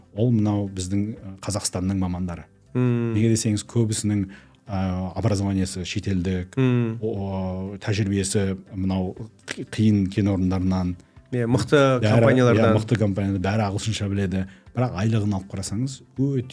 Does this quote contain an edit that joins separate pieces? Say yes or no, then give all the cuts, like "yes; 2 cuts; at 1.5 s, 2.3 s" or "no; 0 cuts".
no; 0 cuts